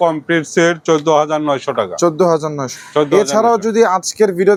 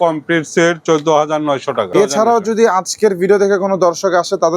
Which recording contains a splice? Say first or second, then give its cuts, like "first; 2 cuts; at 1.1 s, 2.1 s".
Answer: second; 1 cut; at 1.9 s